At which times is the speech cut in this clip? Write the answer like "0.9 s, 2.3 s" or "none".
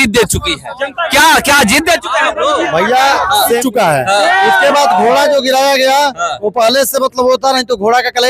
3.6 s